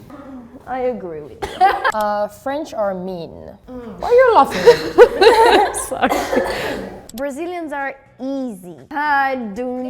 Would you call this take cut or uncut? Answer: cut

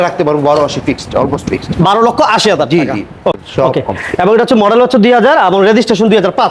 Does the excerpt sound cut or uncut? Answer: cut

